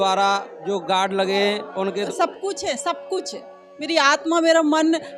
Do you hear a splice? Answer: yes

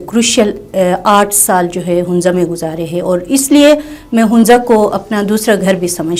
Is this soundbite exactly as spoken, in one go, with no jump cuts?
yes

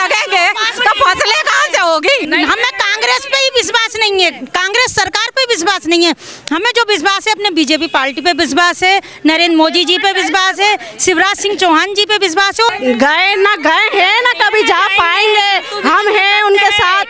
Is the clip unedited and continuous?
no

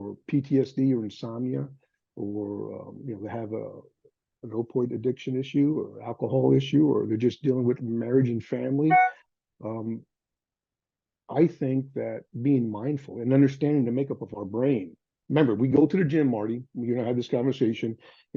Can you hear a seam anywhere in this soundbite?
no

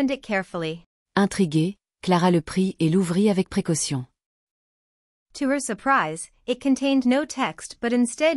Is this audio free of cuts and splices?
yes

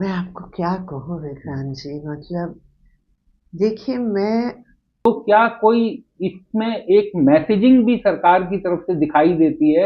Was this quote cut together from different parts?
yes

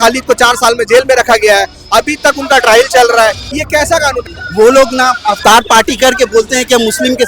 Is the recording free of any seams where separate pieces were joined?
no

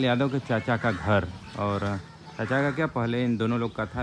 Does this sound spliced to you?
no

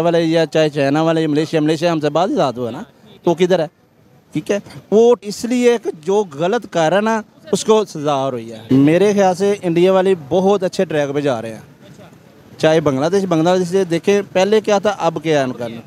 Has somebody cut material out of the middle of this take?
yes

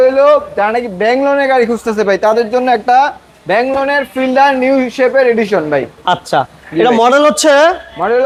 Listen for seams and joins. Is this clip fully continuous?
yes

